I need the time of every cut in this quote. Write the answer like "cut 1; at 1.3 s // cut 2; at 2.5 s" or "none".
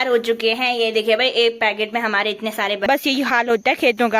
cut 1; at 2.9 s